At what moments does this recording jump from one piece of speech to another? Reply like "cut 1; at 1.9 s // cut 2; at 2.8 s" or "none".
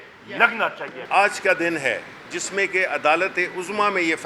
none